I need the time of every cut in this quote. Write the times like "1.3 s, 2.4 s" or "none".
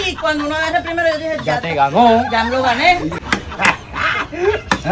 3.2 s